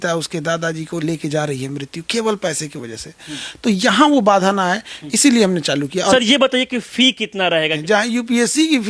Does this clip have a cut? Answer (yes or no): yes